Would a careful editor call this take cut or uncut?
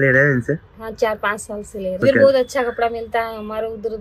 cut